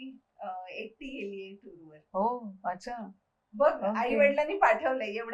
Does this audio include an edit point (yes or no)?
no